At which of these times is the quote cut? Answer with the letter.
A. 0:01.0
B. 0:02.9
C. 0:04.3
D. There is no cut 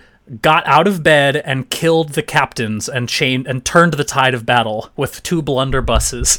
D